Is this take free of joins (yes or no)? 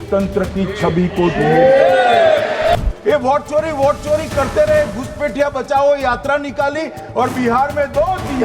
no